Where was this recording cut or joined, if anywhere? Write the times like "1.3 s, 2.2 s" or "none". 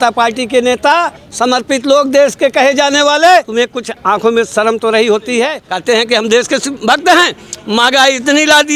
1.2 s, 3.6 s, 5.7 s, 6.7 s